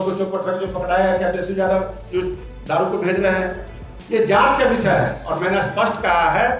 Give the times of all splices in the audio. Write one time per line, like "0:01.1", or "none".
none